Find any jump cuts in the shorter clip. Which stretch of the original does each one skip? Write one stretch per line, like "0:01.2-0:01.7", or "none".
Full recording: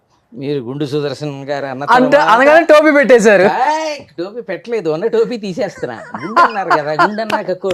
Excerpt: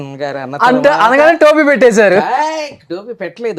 none